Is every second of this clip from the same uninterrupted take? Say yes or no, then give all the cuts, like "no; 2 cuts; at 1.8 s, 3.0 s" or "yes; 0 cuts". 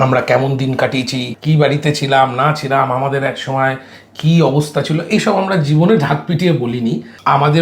no; 1 cut; at 1.3 s